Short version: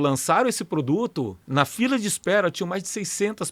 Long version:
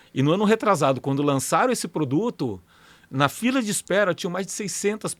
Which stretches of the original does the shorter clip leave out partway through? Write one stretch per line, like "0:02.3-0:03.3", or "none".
0:02.6-0:03.0